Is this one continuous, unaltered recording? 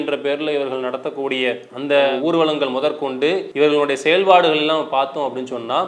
no; 1 cut; at 3.5 s

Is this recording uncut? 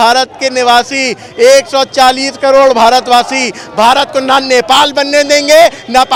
yes; 0 cuts

